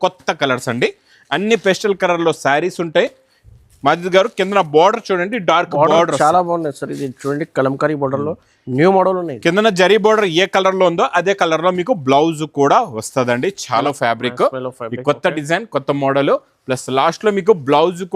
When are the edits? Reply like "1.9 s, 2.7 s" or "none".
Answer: 13.8 s